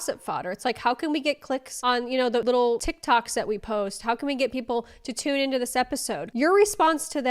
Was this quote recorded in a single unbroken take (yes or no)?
no